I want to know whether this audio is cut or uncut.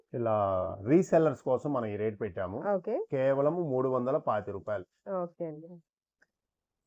uncut